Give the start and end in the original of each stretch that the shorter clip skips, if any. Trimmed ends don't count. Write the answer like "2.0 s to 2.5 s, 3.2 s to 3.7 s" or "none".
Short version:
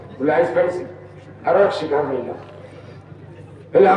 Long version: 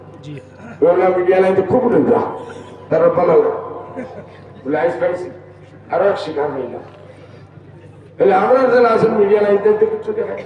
none